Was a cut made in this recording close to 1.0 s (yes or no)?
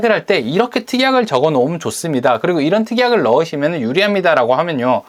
no